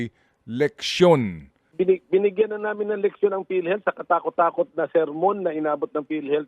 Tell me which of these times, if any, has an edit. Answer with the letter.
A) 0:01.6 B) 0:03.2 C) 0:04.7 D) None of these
A